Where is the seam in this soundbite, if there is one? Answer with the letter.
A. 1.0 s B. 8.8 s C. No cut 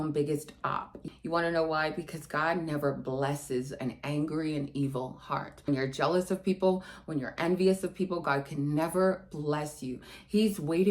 A